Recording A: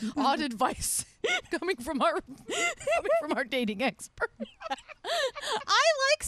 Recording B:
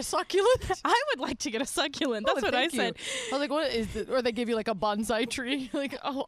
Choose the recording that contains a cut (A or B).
A